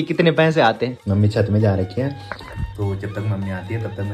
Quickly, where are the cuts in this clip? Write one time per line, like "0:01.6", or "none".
0:01.0